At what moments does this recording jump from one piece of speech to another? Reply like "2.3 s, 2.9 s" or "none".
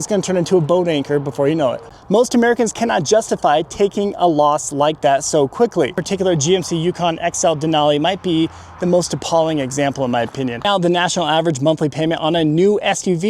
1.8 s, 6.0 s, 10.6 s